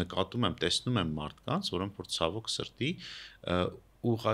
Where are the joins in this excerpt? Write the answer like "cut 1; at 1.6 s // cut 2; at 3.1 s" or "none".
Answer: none